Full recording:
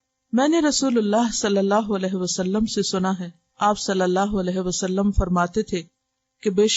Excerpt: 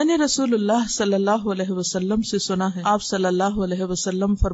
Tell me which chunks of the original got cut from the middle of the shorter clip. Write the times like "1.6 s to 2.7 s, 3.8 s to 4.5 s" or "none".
3.2 s to 3.5 s

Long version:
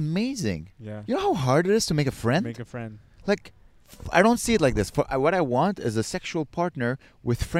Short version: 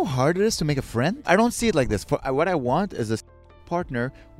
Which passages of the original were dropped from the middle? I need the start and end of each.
2.5 s to 4.1 s

